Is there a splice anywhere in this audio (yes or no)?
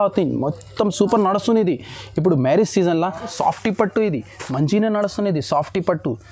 yes